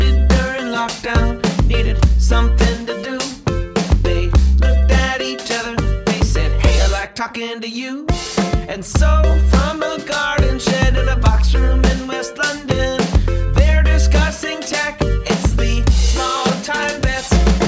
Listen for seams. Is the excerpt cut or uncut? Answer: uncut